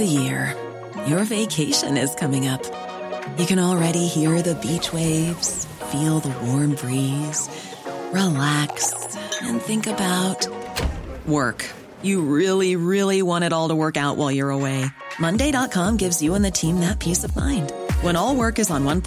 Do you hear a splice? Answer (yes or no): no